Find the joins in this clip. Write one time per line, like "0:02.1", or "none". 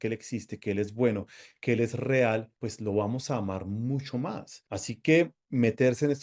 none